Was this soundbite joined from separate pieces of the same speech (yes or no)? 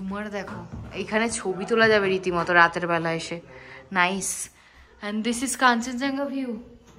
no